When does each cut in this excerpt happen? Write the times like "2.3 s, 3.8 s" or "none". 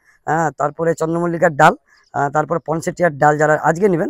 none